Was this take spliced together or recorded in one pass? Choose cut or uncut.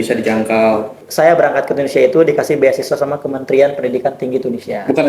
cut